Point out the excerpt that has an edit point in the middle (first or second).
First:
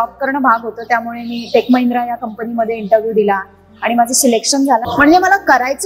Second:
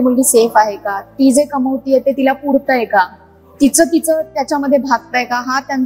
first